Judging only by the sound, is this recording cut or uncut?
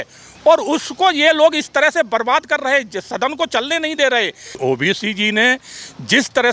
cut